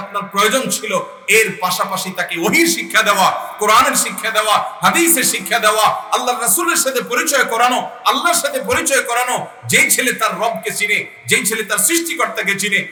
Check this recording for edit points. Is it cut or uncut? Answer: uncut